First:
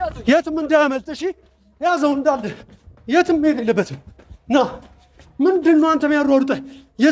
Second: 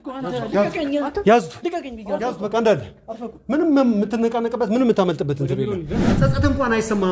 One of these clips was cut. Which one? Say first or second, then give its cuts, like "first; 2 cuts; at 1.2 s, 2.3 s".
second; 1 cut; at 6.1 s